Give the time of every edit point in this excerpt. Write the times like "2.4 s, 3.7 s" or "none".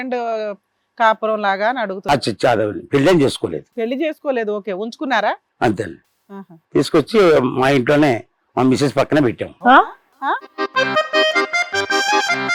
none